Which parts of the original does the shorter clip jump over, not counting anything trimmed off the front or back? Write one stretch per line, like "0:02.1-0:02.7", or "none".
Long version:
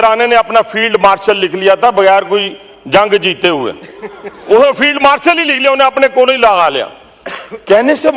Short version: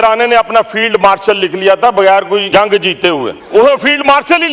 0:02.5-0:02.9
0:03.8-0:04.3

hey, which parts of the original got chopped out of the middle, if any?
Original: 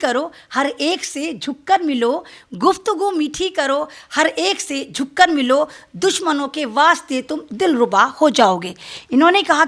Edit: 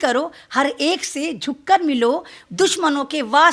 0:02.4-0:05.8

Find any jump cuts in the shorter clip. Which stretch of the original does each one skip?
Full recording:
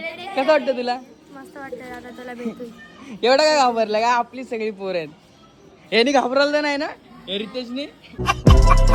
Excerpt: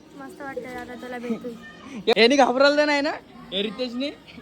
0:03.3-0:05.9

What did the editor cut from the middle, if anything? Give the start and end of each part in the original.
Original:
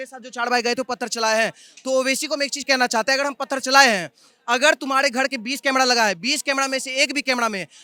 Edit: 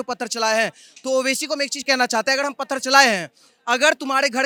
none

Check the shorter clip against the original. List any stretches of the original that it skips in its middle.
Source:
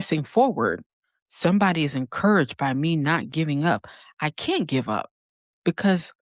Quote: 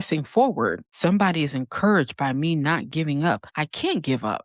0:00.8-0:01.3
0:04.0-0:04.2

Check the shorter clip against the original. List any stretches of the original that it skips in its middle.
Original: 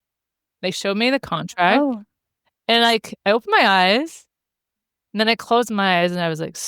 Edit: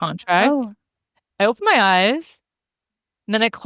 0:02.5-0:03.1

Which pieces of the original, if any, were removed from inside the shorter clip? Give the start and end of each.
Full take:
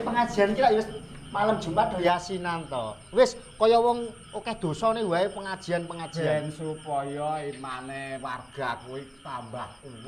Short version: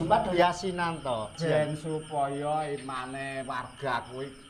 0:03.0-0:06.0

